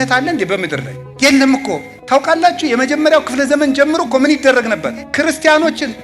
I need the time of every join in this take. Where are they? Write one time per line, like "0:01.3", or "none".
0:01.0
0:01.9
0:05.0

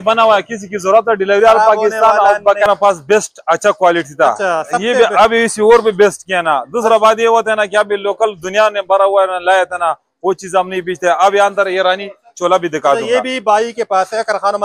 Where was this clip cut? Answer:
0:02.6

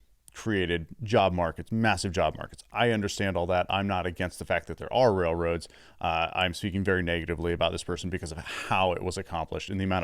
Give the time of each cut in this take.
none

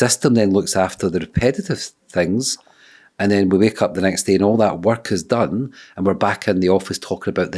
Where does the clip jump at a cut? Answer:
none

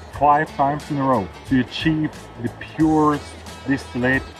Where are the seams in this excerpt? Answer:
0:01.4

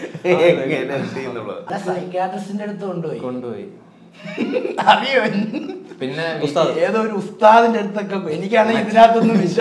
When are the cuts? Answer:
0:01.7

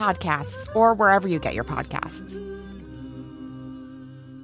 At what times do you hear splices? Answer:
0:02.0

